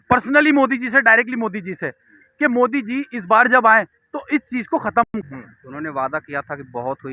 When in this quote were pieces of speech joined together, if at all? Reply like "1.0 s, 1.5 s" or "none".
5.1 s